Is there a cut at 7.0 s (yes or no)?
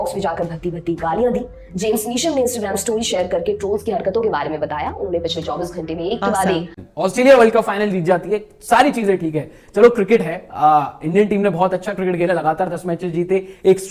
no